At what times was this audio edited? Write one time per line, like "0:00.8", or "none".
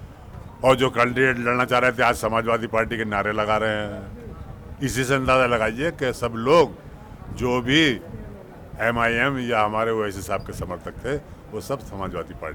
none